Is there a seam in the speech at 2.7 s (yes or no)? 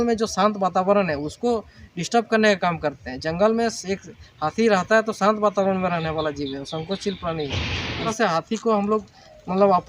no